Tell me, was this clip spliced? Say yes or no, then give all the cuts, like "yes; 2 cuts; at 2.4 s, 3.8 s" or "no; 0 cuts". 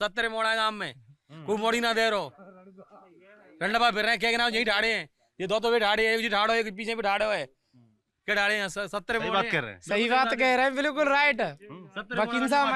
no; 0 cuts